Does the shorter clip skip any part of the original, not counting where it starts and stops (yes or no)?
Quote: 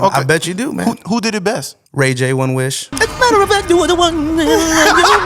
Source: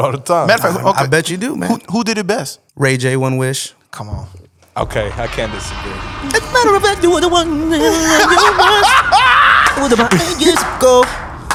yes